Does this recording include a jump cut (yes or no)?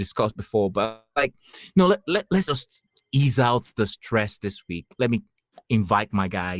no